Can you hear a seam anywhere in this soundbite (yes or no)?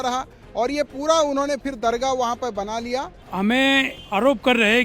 yes